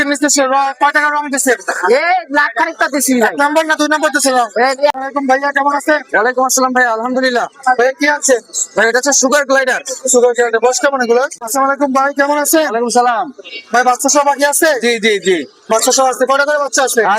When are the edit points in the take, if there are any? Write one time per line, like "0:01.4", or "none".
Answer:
0:05.0
0:11.3